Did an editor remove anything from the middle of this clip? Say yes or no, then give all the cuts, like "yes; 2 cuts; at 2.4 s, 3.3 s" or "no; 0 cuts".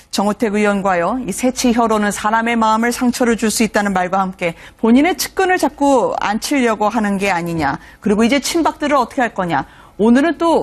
yes; 1 cut; at 7.1 s